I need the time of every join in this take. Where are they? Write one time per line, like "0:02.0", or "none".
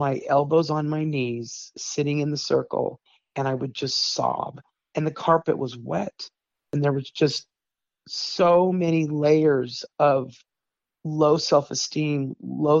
0:06.7